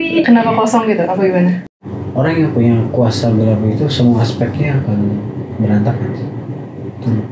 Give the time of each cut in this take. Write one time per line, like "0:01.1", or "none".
0:01.7